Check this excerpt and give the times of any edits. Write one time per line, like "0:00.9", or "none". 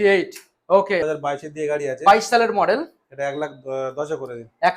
0:01.0